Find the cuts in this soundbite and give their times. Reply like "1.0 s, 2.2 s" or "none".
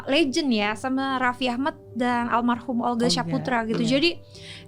none